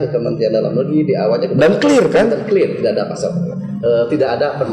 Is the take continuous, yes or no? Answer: yes